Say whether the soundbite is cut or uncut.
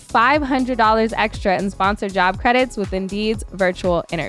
uncut